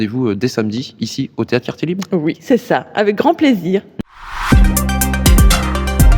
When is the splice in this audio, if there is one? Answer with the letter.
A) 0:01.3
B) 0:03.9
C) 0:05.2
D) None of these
B